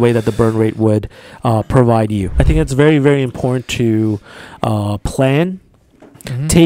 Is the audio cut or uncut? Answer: cut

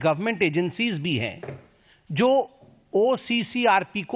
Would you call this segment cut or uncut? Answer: cut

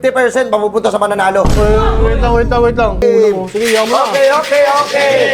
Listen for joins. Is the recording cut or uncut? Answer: cut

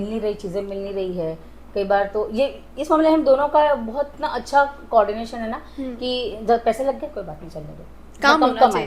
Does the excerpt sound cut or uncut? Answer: uncut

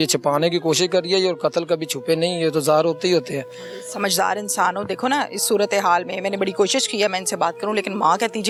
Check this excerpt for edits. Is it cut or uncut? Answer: uncut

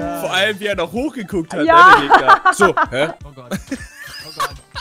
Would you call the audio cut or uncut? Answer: cut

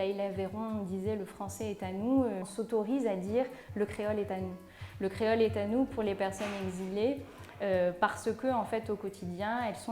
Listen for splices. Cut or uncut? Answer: cut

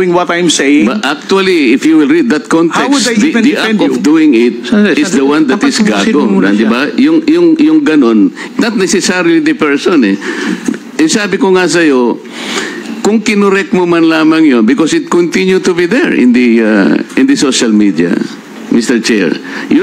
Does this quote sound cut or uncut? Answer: uncut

